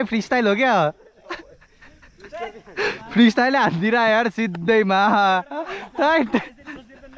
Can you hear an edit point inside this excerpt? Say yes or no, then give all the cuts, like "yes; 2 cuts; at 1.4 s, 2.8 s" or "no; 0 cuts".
no; 0 cuts